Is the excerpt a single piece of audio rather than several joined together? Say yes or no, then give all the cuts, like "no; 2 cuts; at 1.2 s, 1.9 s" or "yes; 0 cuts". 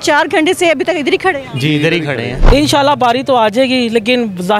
no; 1 cut; at 2.4 s